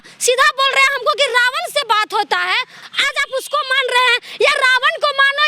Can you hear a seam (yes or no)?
yes